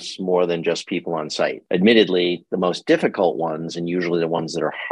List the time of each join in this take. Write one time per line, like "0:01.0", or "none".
0:01.6